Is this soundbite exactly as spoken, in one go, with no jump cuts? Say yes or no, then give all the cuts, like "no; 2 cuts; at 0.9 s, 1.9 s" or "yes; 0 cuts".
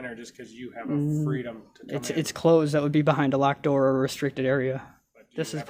yes; 0 cuts